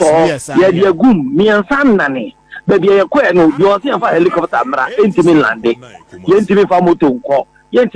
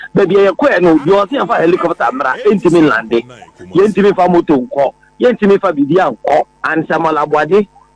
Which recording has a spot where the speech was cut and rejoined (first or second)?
second